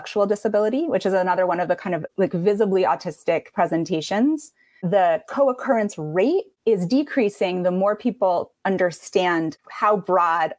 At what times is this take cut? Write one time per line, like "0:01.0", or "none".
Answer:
0:02.1
0:04.8
0:06.5

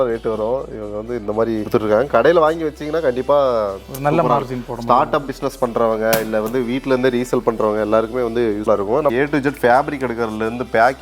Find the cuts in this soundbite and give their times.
0:01.7
0:08.7

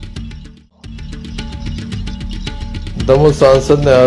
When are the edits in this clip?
0:01.0
0:02.8

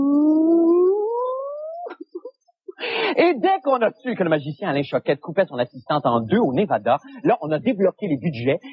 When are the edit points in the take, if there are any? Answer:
none

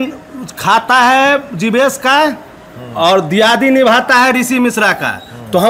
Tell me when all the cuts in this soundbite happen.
none

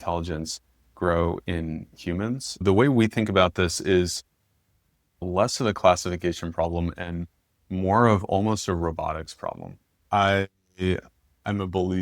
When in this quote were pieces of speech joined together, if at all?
0:02.6
0:05.2
0:10.0

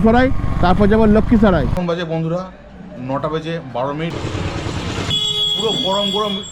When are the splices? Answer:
0:01.7
0:04.1
0:05.1

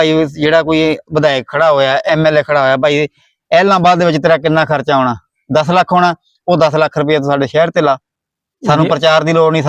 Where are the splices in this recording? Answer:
none

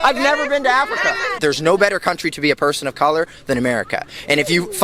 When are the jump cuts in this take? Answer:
0:01.4

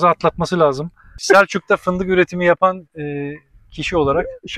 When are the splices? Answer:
0:01.2

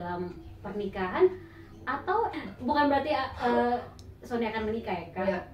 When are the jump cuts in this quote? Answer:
0:02.4

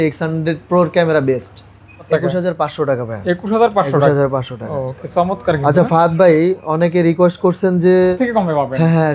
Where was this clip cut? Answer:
0:02.1
0:08.2

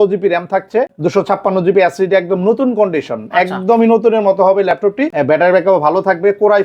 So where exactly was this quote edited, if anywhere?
0:00.9
0:05.1

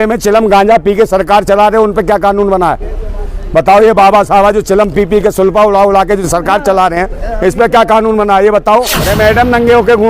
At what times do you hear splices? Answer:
0:09.1

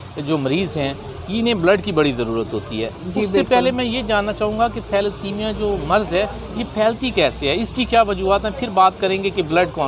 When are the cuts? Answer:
none

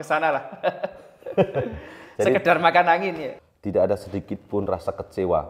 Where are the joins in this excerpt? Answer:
0:03.3

